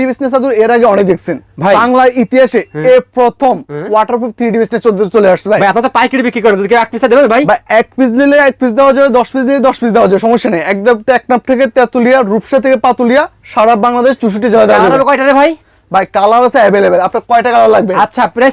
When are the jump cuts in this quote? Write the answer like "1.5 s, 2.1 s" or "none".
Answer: none